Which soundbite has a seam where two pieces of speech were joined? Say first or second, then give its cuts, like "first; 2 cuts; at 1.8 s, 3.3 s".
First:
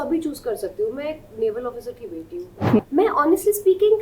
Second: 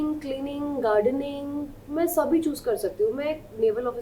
first; 1 cut; at 2.8 s